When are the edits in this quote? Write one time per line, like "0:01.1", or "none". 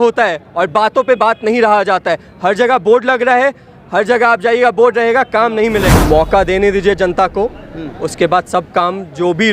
0:05.9